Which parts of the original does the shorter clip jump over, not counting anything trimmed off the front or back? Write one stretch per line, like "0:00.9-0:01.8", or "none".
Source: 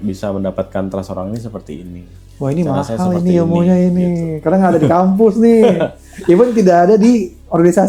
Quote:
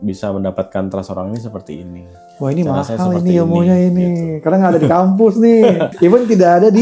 0:05.9-0:06.1